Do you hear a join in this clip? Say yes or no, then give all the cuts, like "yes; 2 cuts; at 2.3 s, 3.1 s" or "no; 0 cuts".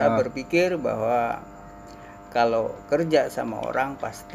no; 0 cuts